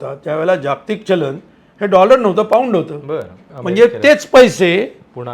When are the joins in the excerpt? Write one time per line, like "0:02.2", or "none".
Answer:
0:03.5